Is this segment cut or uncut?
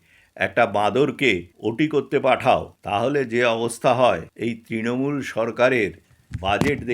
cut